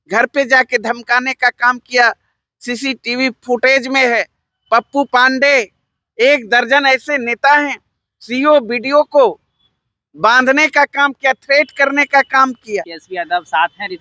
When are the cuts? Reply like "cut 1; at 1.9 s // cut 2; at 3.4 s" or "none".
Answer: cut 1; at 13.0 s